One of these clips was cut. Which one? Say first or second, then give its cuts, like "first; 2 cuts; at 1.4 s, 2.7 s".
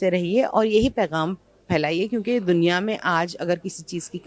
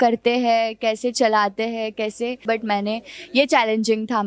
second; 1 cut; at 2.4 s